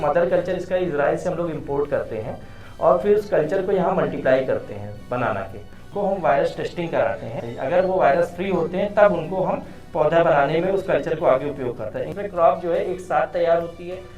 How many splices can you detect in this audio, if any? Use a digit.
3